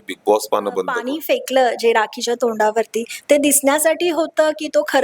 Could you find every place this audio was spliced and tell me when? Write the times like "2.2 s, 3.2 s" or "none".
1.1 s